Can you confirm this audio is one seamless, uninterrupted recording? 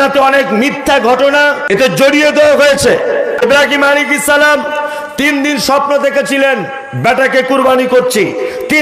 no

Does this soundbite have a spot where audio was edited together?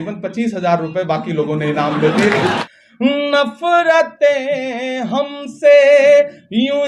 yes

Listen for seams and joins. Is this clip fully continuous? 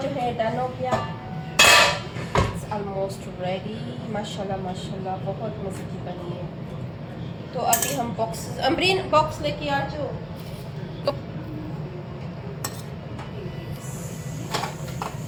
yes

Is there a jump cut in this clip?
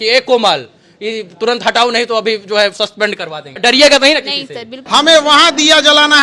yes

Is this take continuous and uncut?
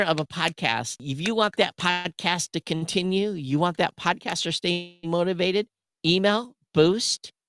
no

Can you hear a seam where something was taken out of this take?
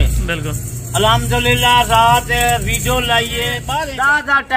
yes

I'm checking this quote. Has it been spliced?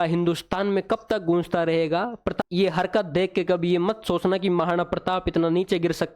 yes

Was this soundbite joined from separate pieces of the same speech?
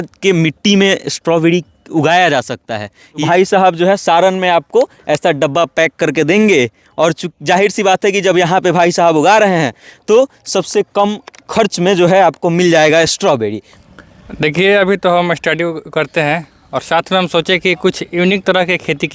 yes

